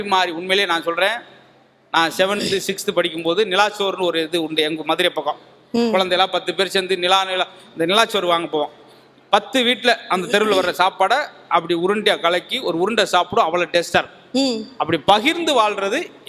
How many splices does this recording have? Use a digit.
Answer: 0